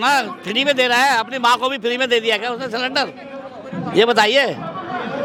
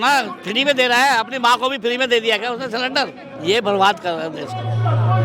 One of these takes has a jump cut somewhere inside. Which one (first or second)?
second